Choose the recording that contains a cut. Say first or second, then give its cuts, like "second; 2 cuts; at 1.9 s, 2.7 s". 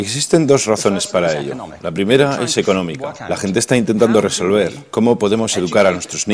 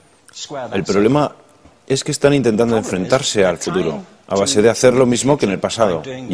second; 1 cut; at 2.5 s